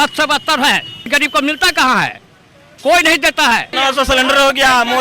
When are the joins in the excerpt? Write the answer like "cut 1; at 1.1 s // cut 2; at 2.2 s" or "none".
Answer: cut 1; at 1.1 s // cut 2; at 3.7 s